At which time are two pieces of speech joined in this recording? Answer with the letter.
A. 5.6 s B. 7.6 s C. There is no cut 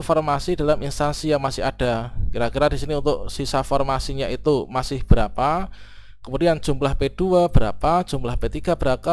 C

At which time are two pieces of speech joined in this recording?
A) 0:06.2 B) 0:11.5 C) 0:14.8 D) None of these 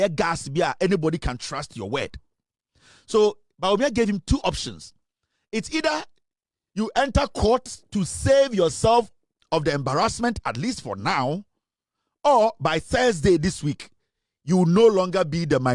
D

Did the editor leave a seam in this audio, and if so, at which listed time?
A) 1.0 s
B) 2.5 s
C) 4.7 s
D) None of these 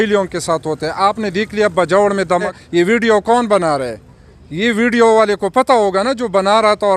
B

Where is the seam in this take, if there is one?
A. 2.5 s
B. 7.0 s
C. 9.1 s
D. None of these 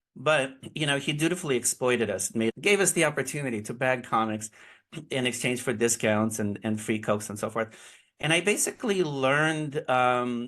A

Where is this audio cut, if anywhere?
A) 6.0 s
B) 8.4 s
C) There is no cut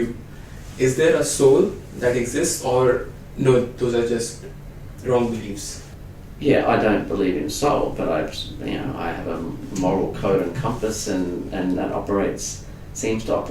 A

